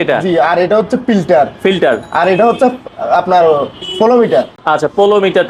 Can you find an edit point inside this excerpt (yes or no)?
no